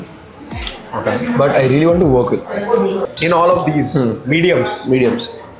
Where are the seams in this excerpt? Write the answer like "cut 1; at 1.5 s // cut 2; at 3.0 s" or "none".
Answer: cut 1; at 3.0 s